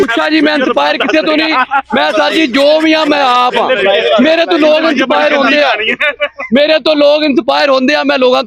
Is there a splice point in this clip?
no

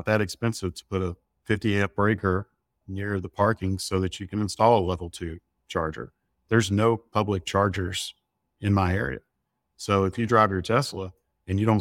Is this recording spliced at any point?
no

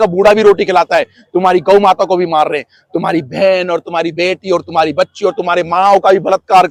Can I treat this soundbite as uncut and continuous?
yes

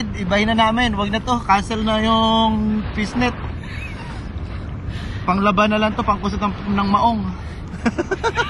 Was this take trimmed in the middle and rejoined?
no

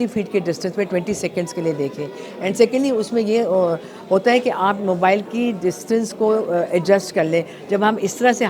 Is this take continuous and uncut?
yes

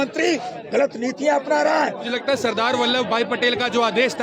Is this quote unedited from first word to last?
no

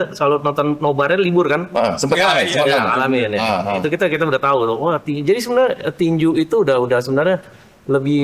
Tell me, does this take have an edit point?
no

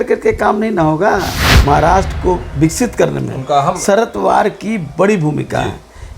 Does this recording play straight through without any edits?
no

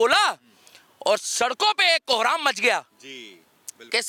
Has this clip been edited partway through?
no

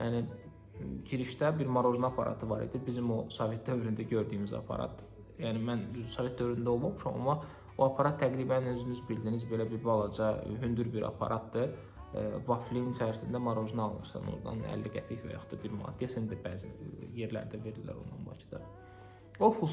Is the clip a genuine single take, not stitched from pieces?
yes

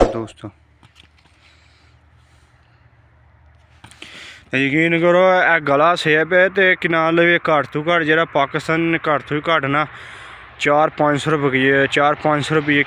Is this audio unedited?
yes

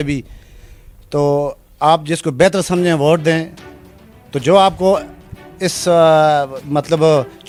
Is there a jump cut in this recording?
no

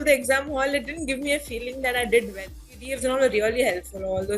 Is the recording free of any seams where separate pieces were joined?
no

